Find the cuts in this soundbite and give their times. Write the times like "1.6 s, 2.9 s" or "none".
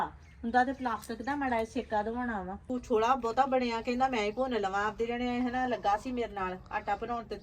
2.6 s